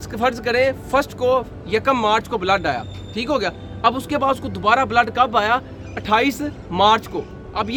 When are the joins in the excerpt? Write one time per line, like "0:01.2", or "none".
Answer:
none